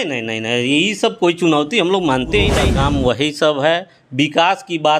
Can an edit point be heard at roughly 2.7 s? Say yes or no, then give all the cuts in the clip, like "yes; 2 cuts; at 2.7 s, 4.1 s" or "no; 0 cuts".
yes; 1 cut; at 2.7 s